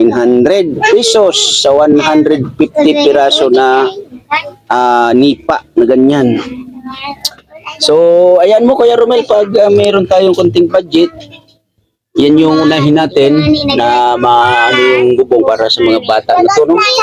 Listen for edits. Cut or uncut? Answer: uncut